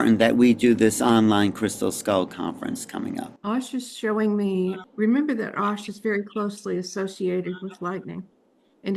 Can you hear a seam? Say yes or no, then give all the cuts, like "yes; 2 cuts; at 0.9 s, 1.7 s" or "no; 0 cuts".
yes; 2 cuts; at 3.3 s, 4.8 s